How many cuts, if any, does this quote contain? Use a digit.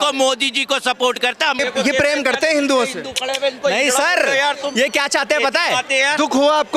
1